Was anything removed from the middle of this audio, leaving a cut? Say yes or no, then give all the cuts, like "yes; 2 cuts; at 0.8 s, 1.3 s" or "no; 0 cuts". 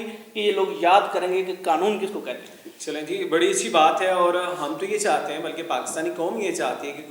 no; 0 cuts